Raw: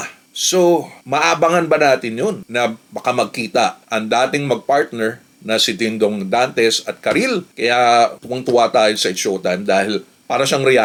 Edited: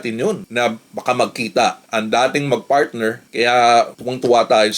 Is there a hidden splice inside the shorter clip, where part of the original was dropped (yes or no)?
yes